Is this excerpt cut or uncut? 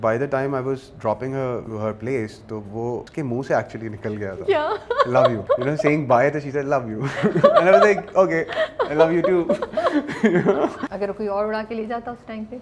cut